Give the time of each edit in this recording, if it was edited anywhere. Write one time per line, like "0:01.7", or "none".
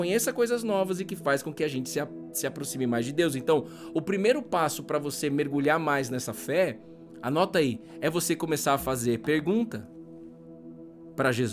none